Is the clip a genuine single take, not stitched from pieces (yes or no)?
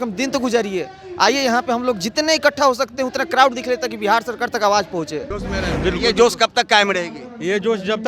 no